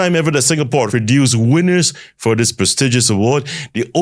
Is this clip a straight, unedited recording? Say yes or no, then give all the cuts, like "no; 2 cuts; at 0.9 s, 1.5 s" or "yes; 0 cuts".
no; 1 cut; at 0.9 s